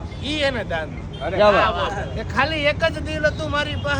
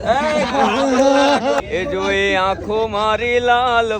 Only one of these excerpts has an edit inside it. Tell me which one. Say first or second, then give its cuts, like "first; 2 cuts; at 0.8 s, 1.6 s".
second; 1 cut; at 1.6 s